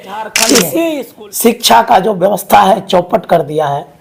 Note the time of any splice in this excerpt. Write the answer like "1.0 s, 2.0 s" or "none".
1.1 s